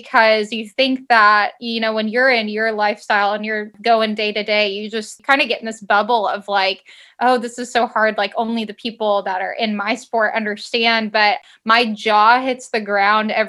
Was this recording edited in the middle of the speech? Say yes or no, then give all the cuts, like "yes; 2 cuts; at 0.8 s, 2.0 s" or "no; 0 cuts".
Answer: yes; 3 cuts; at 3.7 s, 5.1 s, 11.4 s